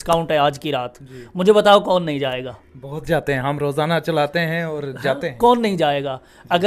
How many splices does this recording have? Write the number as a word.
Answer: zero